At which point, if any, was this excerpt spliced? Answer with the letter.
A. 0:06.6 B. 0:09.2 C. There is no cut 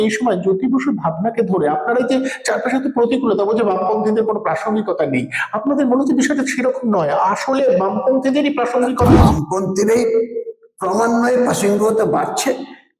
B